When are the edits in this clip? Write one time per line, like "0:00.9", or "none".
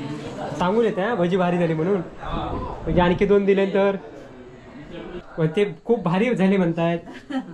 none